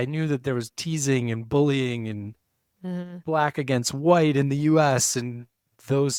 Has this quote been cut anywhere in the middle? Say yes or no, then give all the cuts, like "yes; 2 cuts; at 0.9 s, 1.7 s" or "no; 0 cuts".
no; 0 cuts